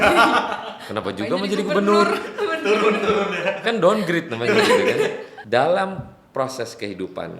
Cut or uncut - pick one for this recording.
cut